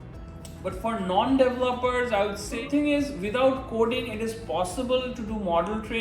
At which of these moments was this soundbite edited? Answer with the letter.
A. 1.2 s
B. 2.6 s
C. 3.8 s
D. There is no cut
B